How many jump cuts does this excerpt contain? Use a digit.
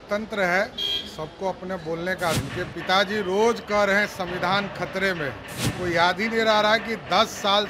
2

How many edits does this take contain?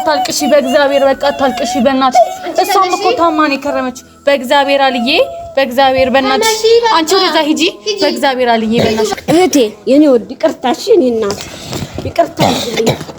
1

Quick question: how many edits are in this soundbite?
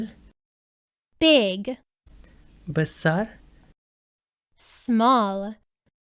1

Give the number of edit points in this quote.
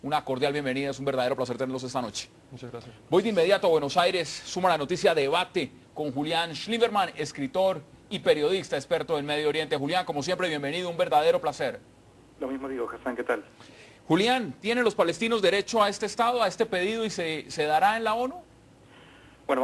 1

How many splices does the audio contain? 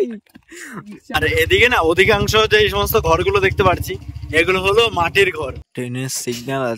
2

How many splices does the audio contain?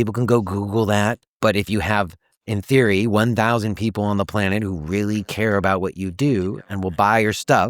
1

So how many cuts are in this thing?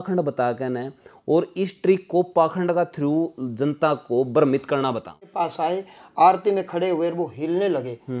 1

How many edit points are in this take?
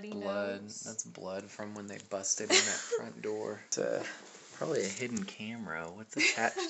1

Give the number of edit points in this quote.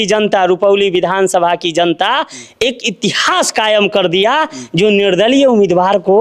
0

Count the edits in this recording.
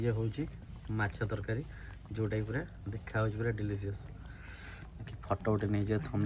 0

